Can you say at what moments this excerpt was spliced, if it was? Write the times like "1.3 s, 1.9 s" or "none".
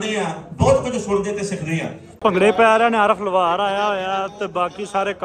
2.2 s

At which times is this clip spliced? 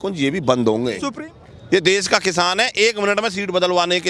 1.0 s

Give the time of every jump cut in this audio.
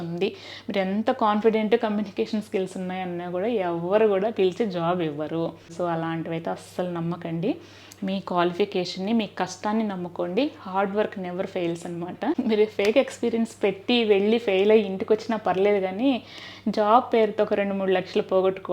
5.7 s, 12.4 s

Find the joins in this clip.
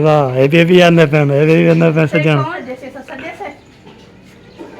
2.6 s

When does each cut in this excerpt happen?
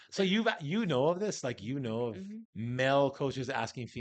2.4 s

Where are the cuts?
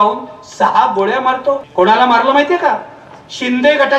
1.7 s

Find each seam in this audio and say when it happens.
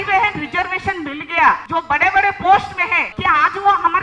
1.6 s, 3.1 s

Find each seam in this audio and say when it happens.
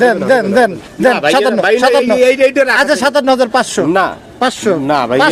none

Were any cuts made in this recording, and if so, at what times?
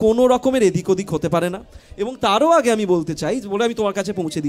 none

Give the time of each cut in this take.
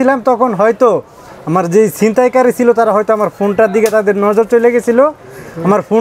none

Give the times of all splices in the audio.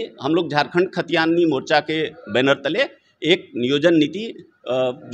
none

